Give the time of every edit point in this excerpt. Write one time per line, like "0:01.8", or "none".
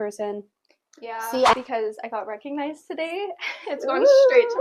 0:01.5